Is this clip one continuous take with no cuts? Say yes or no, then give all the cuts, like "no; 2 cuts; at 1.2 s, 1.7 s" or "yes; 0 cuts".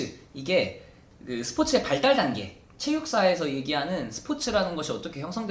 yes; 0 cuts